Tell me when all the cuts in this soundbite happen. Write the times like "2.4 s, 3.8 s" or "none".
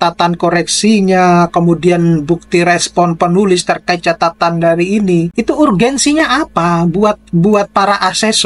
5.3 s